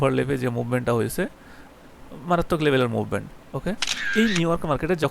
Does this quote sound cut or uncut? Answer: cut